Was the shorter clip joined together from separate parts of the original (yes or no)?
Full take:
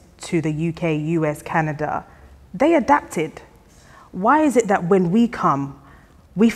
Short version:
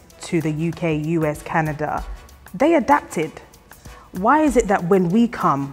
no